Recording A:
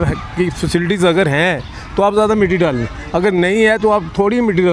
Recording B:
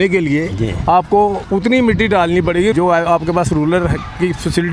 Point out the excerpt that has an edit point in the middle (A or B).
B